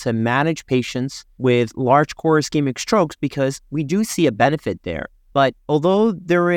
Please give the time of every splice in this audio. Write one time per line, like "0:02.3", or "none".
none